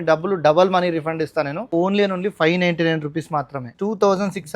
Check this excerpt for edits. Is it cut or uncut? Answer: cut